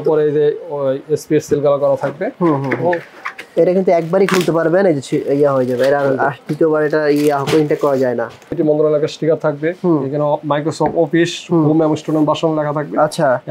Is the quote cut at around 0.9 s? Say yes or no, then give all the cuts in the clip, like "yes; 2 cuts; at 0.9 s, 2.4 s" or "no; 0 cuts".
no; 2 cuts; at 3.5 s, 8.5 s